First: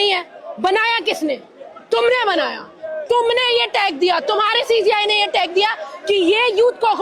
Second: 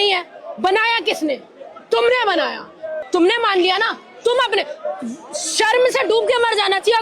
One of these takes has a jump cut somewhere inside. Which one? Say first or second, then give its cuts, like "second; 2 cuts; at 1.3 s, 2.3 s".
second; 1 cut; at 2.9 s